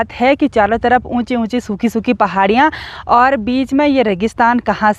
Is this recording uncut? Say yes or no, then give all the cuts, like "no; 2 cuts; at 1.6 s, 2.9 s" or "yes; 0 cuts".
yes; 0 cuts